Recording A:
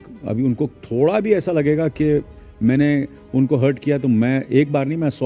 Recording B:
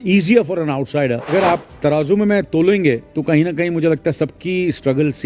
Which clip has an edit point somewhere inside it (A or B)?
B